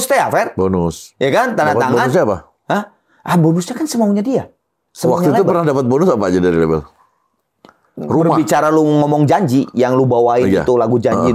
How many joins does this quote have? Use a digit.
0